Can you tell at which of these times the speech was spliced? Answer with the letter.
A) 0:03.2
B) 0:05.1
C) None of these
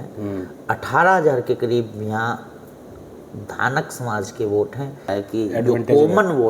B